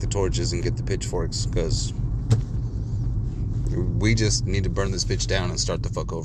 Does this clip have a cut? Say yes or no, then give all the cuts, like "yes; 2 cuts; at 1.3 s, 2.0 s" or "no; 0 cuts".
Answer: no; 0 cuts